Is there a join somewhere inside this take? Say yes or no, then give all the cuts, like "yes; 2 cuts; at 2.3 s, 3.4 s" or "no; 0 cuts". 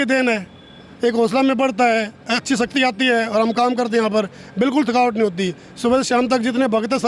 no; 0 cuts